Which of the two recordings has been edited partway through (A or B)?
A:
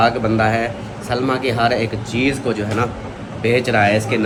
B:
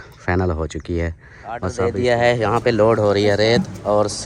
B